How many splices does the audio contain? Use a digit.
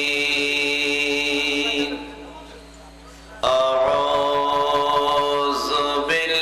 0